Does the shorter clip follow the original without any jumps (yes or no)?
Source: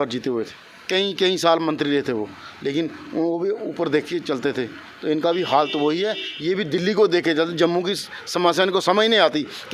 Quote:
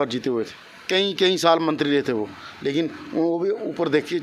yes